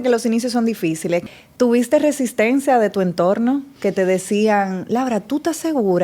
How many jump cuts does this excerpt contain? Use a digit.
1